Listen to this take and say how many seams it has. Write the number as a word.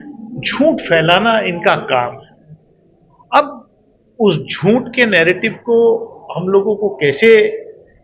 zero